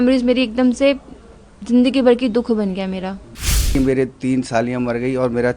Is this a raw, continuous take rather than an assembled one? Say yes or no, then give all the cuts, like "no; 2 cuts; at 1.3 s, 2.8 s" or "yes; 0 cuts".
no; 1 cut; at 3.7 s